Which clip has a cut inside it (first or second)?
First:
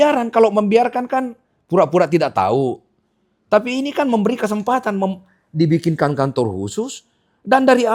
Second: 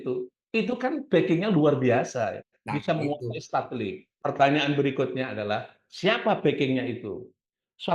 second